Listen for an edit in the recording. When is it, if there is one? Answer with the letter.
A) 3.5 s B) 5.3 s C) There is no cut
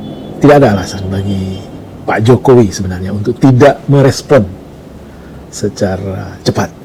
C